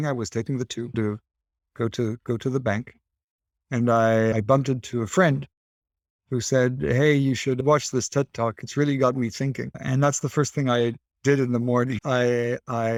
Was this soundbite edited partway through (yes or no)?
no